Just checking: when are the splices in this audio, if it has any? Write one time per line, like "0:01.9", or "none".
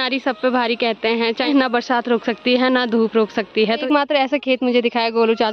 0:01.5
0:03.7